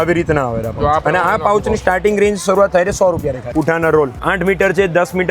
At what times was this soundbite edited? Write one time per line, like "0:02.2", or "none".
0:03.5
0:04.2